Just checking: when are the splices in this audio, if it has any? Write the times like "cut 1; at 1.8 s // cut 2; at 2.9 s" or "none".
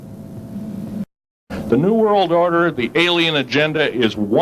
cut 1; at 1.3 s